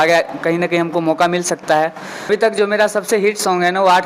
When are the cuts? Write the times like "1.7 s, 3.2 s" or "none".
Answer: 2.3 s